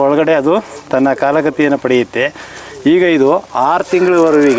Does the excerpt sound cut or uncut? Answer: uncut